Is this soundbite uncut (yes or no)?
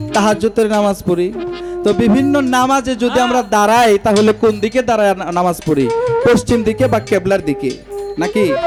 yes